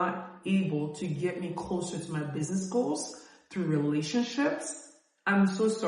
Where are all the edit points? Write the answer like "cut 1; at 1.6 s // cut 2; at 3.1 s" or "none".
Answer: none

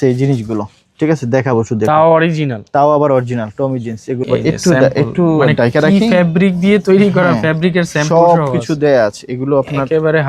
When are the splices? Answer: cut 1; at 4.1 s

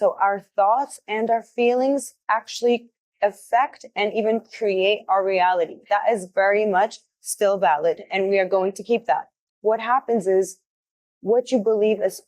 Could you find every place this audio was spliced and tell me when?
cut 1; at 9.5 s

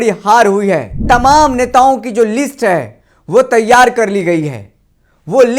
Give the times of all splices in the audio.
cut 1; at 1.0 s

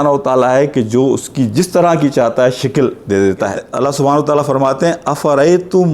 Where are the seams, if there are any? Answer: cut 1; at 3.7 s

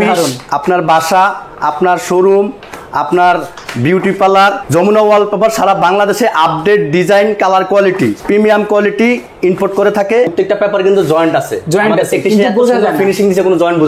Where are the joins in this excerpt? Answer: cut 1; at 4.6 s // cut 2; at 8.2 s // cut 3; at 10.3 s

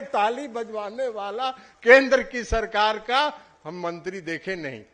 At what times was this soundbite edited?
none

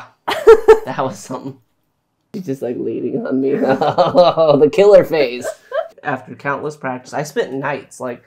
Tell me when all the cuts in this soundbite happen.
cut 1; at 2.4 s // cut 2; at 6.0 s

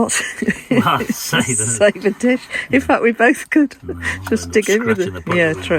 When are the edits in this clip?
none

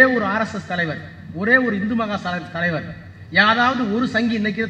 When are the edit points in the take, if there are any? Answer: none

